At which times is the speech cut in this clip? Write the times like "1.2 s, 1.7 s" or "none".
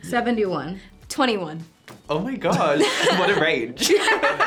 none